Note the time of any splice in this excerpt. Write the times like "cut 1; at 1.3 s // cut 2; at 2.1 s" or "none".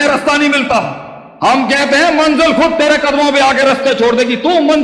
none